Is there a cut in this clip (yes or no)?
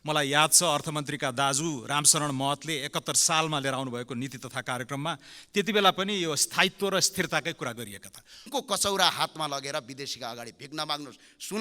yes